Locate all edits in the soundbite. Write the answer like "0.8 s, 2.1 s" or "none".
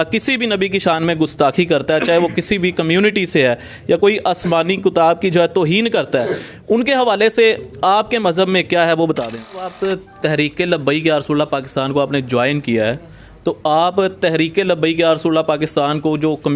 9.7 s